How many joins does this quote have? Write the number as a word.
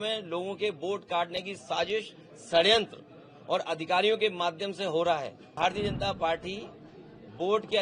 one